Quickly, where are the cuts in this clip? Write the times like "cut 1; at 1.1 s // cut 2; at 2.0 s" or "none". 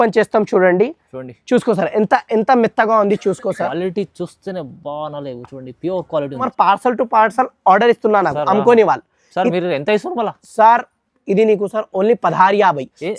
cut 1; at 6.5 s